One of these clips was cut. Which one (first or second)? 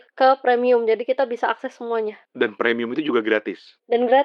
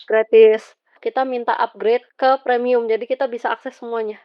second